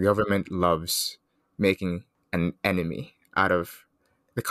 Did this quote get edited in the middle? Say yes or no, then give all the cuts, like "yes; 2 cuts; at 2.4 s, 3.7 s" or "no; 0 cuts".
yes; 1 cut; at 2.1 s